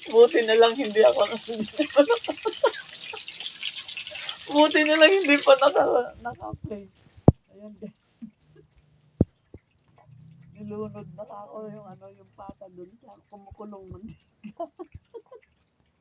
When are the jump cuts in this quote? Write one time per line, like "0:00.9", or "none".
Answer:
none